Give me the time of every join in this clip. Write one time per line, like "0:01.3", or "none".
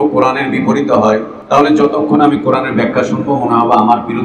0:01.3